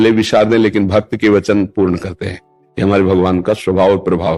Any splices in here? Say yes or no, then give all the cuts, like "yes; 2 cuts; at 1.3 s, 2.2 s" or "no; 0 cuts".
no; 0 cuts